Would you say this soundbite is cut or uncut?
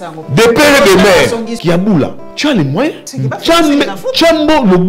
cut